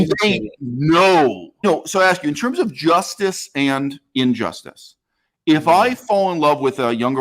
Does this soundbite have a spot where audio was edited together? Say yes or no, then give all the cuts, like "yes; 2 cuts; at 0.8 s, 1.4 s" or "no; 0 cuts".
yes; 1 cut; at 1.6 s